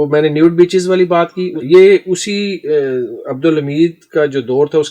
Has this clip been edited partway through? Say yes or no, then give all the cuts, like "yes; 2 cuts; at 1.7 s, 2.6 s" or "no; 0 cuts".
yes; 1 cut; at 1.6 s